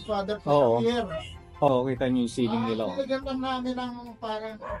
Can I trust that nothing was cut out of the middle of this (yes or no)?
no